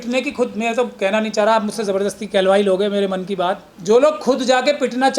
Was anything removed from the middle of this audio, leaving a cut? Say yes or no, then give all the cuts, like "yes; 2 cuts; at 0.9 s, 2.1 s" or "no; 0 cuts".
yes; 1 cut; at 3.7 s